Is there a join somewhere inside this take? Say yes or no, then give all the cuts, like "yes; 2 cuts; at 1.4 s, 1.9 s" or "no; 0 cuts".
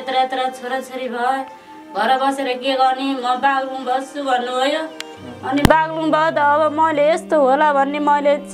no; 0 cuts